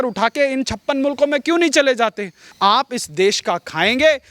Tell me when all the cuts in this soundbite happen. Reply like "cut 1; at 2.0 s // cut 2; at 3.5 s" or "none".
cut 1; at 2.4 s